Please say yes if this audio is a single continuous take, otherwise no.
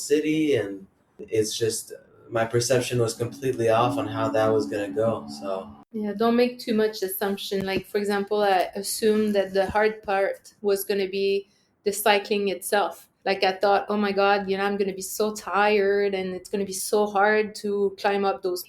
no